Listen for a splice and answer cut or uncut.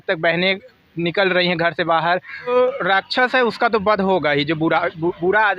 cut